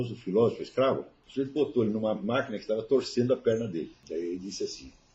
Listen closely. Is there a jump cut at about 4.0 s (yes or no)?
yes